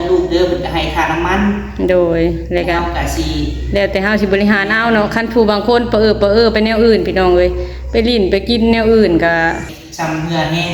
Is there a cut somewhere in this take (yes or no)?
yes